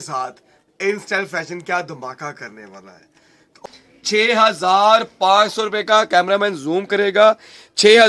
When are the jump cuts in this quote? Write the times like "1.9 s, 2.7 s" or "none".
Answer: 3.5 s